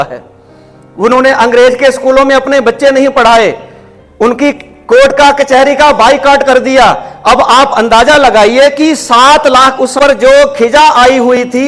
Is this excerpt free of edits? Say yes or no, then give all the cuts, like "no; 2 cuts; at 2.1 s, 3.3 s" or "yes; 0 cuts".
no; 1 cut; at 10.0 s